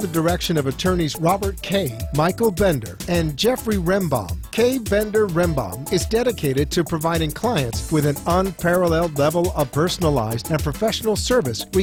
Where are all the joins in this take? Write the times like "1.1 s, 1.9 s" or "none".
none